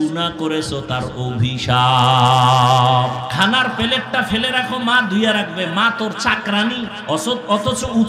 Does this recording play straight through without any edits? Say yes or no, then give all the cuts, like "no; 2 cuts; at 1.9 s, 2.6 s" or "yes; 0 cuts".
no; 2 cuts; at 3.3 s, 7.0 s